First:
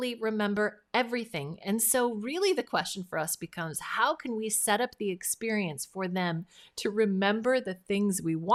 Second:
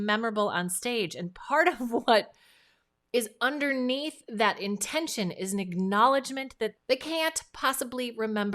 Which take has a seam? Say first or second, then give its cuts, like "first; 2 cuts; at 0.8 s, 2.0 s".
second; 1 cut; at 6.8 s